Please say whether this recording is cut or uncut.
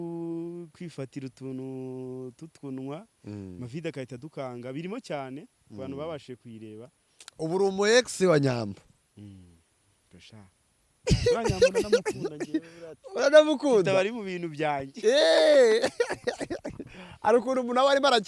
uncut